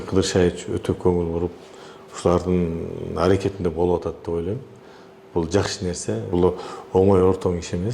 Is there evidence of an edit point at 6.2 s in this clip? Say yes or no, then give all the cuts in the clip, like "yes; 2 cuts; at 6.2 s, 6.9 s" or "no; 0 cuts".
yes; 1 cut; at 6.2 s